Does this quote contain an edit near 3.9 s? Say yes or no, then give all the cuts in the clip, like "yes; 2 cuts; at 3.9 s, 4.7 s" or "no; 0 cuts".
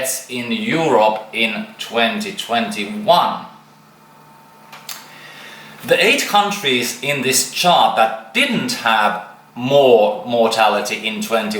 no; 0 cuts